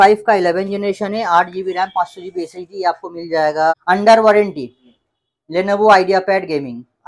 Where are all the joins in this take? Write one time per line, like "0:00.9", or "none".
0:03.7